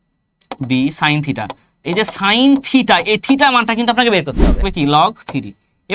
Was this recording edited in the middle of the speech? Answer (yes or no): yes